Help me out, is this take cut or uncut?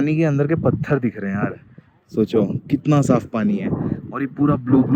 uncut